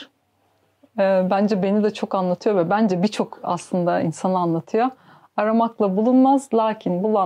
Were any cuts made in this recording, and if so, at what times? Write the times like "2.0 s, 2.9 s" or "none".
none